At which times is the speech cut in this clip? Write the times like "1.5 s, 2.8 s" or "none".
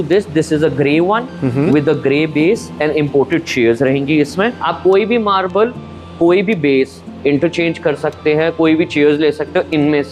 4.6 s